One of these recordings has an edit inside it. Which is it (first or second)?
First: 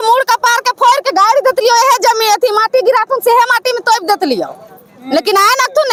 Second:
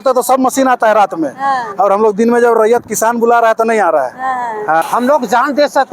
second